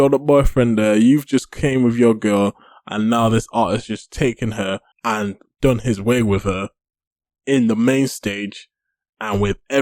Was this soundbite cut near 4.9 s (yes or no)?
yes